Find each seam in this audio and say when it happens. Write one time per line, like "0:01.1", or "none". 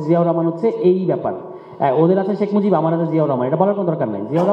none